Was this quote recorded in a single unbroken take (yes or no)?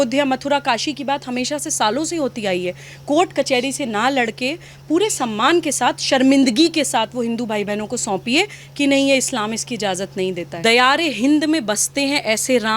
no